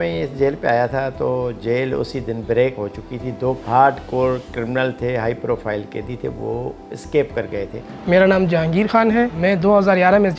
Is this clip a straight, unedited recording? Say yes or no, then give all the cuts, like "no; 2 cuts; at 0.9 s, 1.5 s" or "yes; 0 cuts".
no; 3 cuts; at 3.6 s, 7.8 s, 9.4 s